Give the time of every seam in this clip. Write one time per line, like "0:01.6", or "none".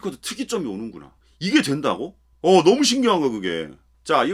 none